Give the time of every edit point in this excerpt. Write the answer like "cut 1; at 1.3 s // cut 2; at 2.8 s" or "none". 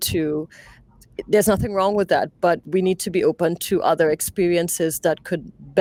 none